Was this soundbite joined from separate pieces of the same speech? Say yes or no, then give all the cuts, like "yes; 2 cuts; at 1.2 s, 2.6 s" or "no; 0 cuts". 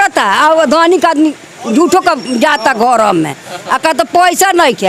no; 0 cuts